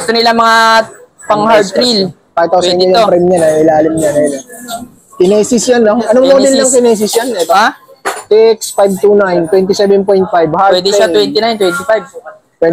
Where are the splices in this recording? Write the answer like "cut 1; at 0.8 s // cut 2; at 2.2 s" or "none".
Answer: none

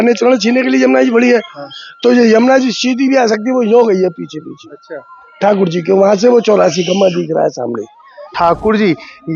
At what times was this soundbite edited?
cut 1; at 8.3 s

